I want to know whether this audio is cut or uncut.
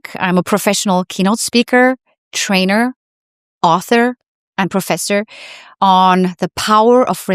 uncut